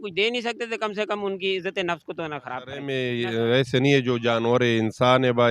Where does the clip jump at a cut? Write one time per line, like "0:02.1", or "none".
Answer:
0:02.8

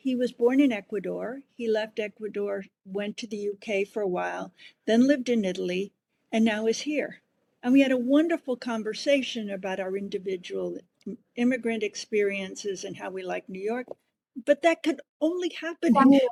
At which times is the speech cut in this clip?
none

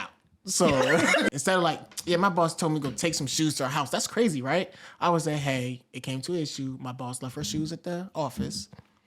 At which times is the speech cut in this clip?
0:01.4

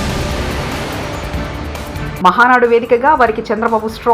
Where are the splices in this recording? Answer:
0:01.9

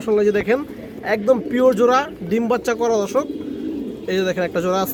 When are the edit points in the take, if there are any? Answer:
none

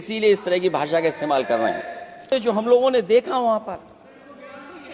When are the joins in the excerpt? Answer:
0:02.3

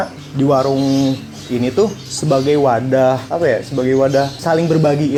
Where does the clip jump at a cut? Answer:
none

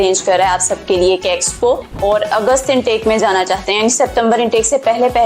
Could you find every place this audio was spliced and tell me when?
0:01.9

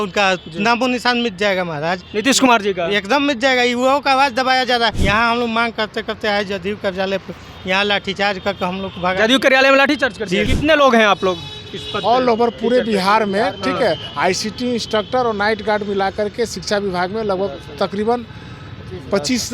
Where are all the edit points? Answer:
0:05.0
0:10.5

